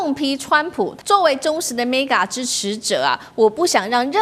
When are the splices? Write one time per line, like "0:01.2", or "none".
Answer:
0:01.0